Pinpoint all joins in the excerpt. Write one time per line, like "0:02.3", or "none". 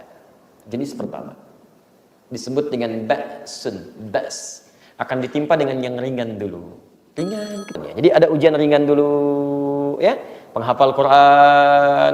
0:07.8